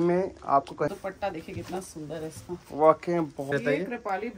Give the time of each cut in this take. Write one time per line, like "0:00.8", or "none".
0:00.9
0:03.5